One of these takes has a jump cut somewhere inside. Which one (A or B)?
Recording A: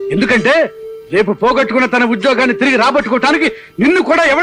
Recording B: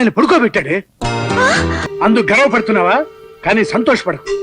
B